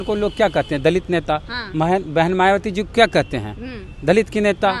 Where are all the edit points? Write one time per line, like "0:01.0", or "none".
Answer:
none